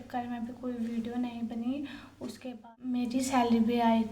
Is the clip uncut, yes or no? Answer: no